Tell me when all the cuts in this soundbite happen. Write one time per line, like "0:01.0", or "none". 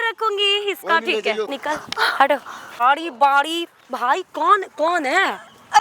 0:01.5
0:02.8